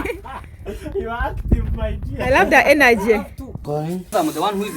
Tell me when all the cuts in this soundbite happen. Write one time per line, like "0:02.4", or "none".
0:03.6